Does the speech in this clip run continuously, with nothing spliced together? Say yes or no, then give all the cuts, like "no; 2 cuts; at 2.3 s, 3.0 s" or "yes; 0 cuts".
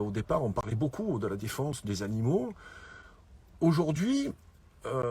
yes; 0 cuts